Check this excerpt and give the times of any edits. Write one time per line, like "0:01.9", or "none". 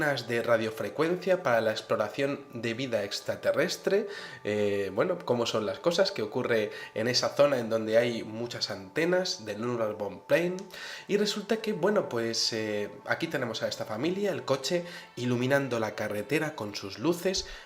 0:02.0